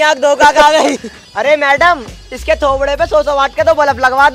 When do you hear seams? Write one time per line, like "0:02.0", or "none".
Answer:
0:01.2